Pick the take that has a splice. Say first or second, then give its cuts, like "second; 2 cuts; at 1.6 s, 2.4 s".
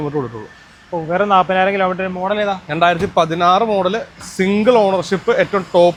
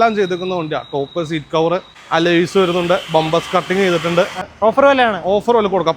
second; 2 cuts; at 1.9 s, 4.5 s